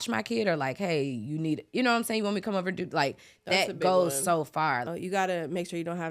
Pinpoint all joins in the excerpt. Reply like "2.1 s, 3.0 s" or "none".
4.9 s